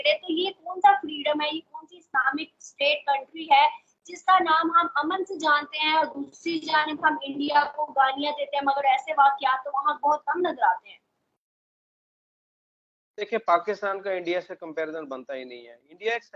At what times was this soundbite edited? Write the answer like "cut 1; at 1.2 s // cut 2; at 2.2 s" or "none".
none